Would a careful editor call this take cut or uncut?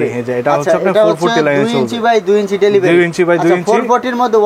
uncut